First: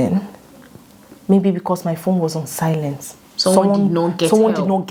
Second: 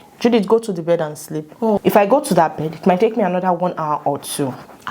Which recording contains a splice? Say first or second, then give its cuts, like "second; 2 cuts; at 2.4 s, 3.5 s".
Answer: second; 1 cut; at 1.8 s